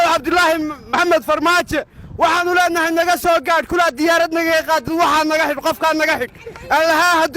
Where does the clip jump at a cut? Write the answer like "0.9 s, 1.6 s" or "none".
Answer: 0.9 s